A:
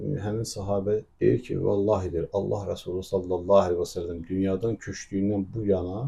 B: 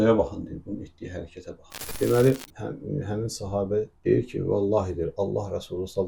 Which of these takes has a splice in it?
B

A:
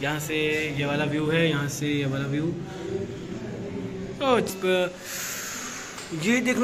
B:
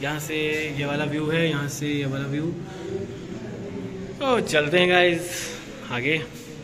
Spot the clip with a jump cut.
A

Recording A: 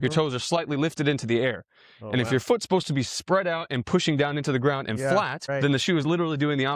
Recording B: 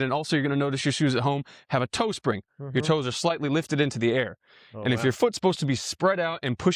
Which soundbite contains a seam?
A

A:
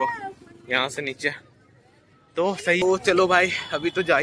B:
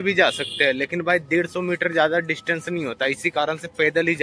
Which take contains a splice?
A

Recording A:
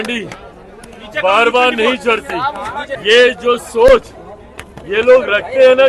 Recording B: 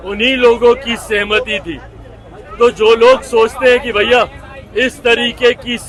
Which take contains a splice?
A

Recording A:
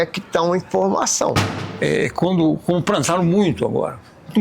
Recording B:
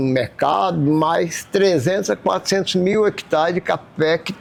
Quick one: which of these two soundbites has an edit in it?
A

